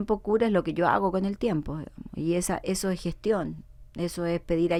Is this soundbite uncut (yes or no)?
yes